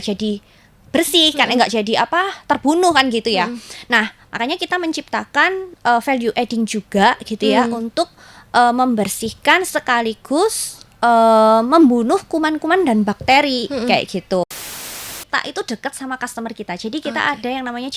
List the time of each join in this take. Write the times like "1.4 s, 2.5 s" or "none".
14.6 s